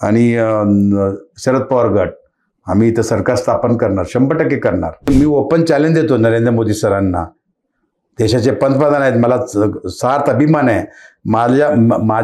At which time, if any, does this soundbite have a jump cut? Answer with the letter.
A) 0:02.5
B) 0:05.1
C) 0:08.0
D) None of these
B